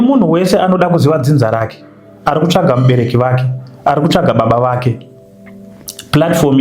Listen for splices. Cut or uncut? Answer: uncut